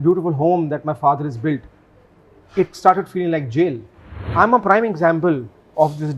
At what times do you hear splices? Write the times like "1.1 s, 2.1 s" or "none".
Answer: 4.2 s